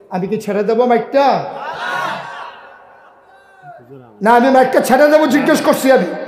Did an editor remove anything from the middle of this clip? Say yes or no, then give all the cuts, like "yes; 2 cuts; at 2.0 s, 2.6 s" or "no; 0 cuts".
no; 0 cuts